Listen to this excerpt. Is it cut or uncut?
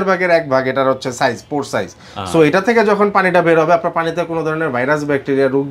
uncut